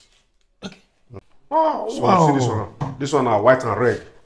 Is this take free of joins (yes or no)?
no